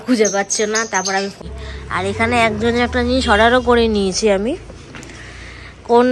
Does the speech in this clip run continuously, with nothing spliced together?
no; 1 cut; at 1.3 s

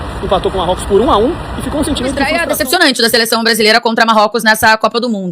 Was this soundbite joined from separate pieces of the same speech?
yes; 1 cut; at 2.4 s

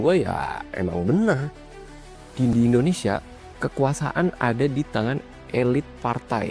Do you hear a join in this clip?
no; 0 cuts

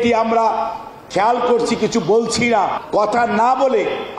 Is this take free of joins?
no; 1 cut; at 2.8 s

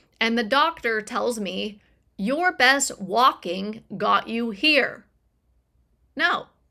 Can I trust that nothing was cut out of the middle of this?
yes; 0 cuts

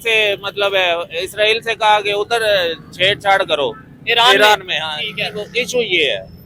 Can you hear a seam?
no; 0 cuts

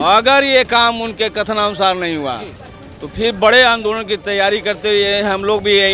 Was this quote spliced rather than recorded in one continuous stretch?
no; 0 cuts

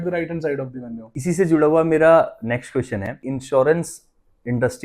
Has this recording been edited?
yes; 2 cuts; at 1.0 s, 3.3 s

